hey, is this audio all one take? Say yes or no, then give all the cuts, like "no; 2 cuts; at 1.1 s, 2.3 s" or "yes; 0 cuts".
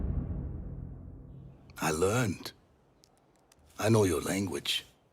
no; 1 cut; at 1.4 s